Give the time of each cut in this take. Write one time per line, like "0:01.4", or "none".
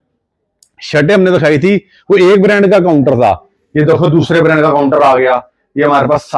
none